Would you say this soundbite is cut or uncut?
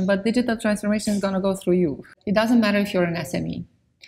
cut